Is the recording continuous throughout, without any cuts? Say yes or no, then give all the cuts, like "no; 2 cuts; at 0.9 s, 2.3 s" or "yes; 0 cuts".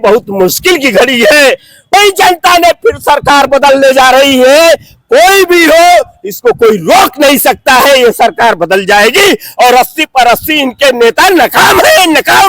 no; 1 cut; at 1.9 s